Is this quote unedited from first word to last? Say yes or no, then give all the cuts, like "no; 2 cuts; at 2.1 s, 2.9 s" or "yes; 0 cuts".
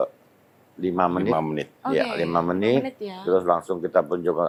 yes; 0 cuts